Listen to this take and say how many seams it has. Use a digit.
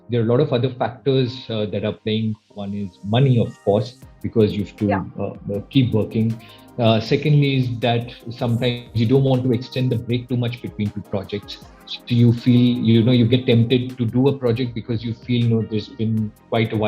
0